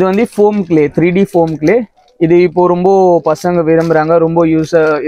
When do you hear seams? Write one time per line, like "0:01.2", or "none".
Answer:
none